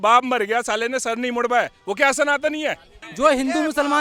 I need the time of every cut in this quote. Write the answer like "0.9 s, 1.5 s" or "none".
3.0 s